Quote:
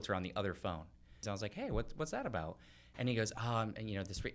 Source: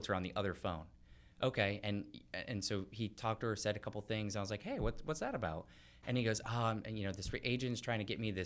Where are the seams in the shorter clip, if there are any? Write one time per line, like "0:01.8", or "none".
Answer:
0:01.2